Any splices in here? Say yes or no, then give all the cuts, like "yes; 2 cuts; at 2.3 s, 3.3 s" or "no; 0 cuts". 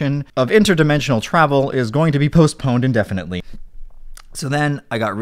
yes; 1 cut; at 3.5 s